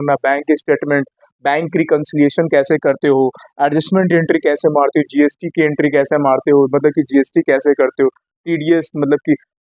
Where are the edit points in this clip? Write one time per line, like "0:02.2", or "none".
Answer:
none